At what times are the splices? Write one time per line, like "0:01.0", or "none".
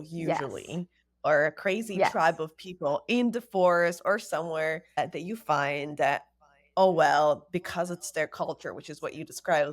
0:05.0